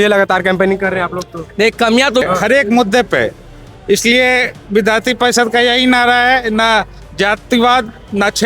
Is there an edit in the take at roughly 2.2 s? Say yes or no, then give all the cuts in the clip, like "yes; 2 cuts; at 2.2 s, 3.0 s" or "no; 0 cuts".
yes; 1 cut; at 2.2 s